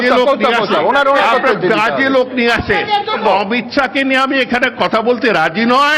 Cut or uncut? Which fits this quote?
cut